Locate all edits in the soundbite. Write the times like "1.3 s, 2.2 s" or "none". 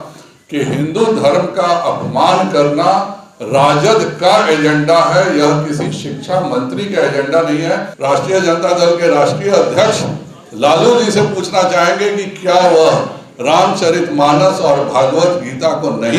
7.9 s